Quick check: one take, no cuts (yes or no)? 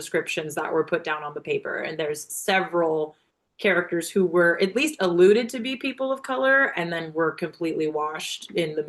yes